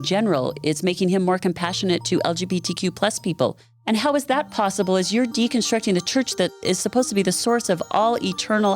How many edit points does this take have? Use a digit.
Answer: 2